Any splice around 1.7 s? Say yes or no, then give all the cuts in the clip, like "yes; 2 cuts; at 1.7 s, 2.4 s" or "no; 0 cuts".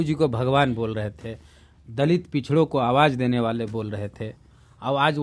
no; 0 cuts